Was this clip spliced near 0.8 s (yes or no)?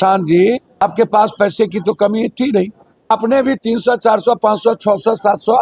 yes